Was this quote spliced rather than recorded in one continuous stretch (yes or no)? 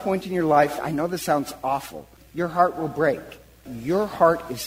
yes